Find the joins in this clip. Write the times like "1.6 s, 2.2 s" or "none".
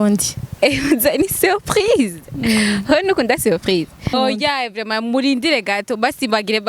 4.1 s